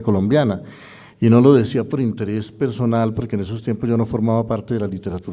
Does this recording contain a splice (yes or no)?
no